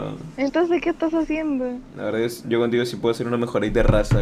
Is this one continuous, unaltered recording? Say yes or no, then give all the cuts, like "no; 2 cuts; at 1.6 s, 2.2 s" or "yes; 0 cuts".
no; 1 cut; at 1.9 s